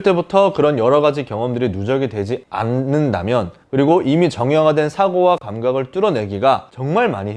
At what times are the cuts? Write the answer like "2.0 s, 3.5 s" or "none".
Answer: none